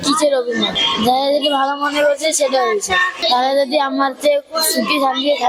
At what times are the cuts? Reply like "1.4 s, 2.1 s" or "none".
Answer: none